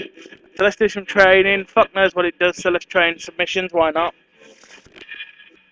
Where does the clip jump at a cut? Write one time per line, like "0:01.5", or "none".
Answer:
0:02.9